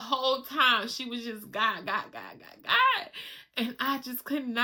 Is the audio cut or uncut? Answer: uncut